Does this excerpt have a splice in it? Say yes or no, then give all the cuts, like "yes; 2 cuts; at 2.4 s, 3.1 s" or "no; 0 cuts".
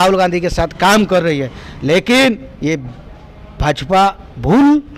no; 0 cuts